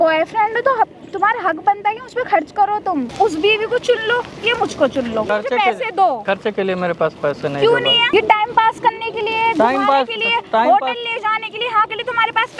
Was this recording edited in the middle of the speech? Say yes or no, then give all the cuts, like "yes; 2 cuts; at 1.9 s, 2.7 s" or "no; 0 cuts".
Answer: yes; 4 cuts; at 3.1 s, 5.3 s, 6.2 s, 8.1 s